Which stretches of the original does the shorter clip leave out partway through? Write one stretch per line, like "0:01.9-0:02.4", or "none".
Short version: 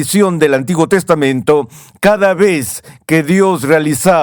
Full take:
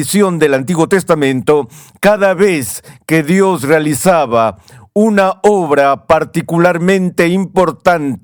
none